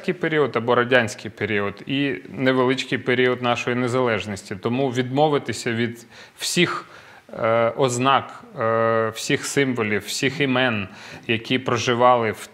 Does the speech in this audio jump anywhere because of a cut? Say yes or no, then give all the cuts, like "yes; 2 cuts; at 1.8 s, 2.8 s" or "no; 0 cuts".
no; 0 cuts